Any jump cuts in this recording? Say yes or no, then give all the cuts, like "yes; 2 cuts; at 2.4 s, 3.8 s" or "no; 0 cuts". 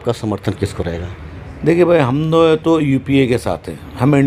no; 0 cuts